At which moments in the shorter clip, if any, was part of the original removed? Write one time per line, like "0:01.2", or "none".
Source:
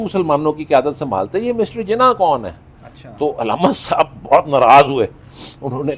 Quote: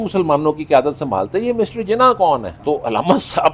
0:02.5